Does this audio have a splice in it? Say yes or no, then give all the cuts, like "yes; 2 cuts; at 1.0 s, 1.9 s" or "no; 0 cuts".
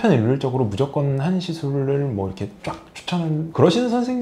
no; 0 cuts